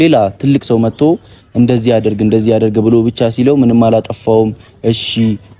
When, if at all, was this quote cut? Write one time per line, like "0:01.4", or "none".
none